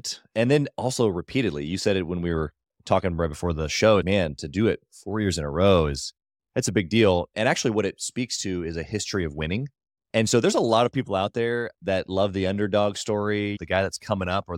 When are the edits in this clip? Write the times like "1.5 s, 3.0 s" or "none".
4.1 s, 7.3 s, 13.6 s